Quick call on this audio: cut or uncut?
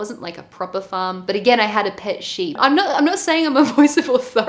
cut